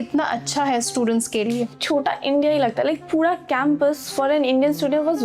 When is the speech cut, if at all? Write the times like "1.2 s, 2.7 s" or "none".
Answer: 1.8 s